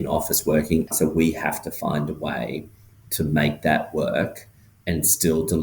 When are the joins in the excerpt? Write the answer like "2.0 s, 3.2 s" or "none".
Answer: 0.9 s